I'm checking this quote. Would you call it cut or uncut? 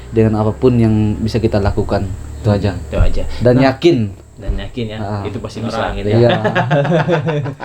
cut